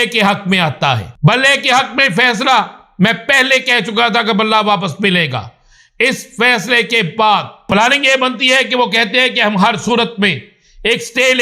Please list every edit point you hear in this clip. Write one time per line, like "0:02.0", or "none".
0:01.1
0:07.7